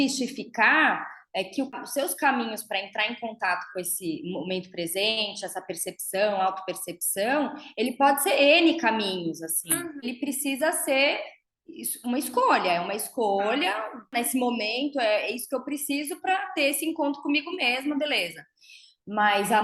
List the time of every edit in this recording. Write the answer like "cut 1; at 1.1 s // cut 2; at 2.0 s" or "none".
cut 1; at 1.7 s // cut 2; at 10.0 s // cut 3; at 14.1 s